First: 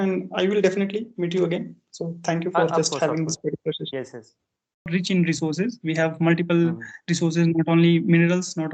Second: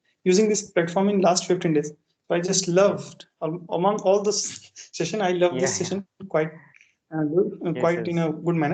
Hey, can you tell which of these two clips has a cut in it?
first; 1 cut; at 4.9 s

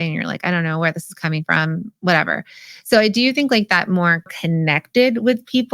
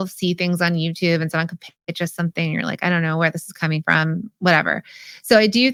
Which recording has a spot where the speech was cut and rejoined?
first; 1 cut; at 4.3 s

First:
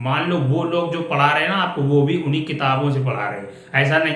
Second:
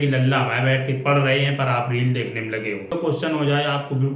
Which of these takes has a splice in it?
second; 1 cut; at 2.9 s

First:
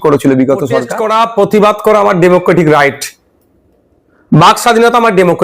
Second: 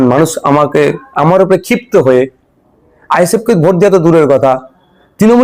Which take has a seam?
first; 1 cut; at 0.9 s

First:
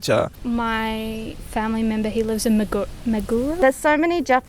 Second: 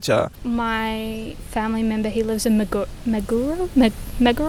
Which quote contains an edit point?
first; 1 cut; at 3.6 s

